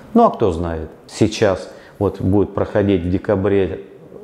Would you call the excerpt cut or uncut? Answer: cut